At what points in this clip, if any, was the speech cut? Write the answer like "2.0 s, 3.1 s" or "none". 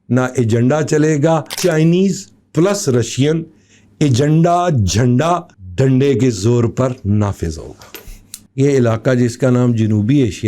1.6 s, 5.6 s, 8.4 s